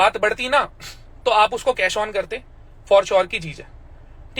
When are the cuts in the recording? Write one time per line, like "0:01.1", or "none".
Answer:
none